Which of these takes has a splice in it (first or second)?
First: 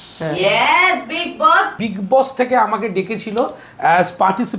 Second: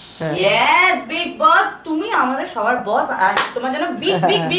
first